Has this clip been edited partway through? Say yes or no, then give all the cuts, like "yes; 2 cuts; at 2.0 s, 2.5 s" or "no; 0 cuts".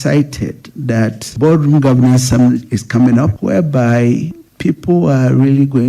no; 0 cuts